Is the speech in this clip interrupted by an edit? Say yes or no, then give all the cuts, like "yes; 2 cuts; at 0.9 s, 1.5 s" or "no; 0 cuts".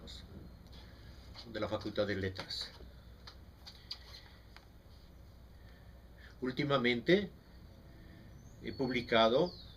yes; 1 cut; at 7.4 s